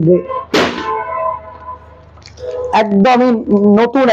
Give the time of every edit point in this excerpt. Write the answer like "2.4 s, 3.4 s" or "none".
none